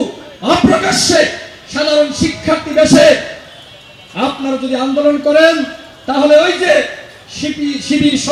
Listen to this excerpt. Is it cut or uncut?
uncut